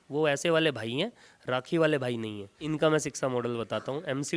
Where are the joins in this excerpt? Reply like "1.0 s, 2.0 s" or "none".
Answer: 2.5 s